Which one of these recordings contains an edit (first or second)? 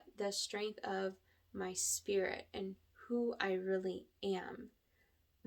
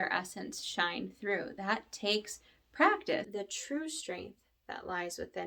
second